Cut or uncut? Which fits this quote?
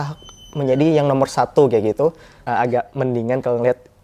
cut